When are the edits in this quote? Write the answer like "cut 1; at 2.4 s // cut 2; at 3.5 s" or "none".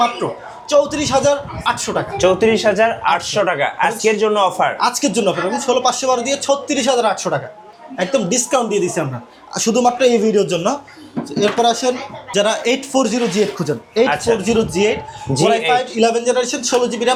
none